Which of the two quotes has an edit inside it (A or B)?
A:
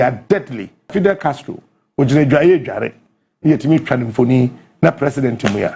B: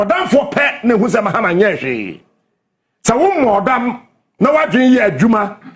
A